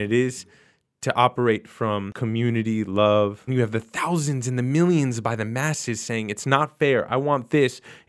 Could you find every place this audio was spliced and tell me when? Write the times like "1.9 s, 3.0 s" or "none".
2.1 s, 3.5 s